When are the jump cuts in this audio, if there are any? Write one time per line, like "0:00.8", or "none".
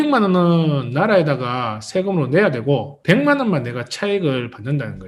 none

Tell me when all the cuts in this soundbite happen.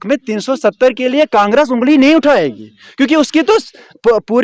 none

